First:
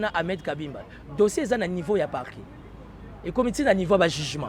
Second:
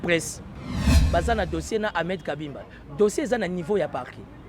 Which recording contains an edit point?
second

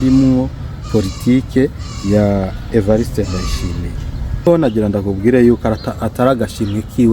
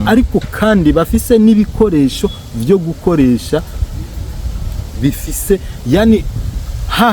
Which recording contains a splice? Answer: first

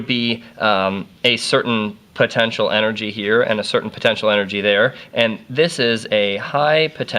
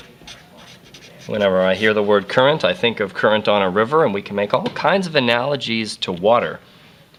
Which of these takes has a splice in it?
first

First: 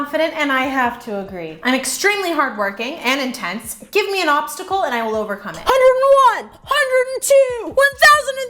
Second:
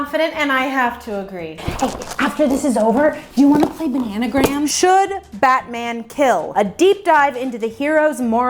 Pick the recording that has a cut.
second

